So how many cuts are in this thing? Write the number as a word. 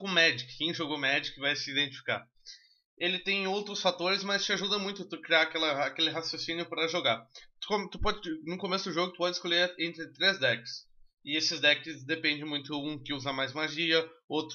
zero